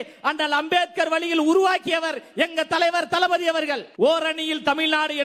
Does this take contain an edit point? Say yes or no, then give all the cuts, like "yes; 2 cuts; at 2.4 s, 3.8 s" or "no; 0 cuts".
yes; 1 cut; at 3.9 s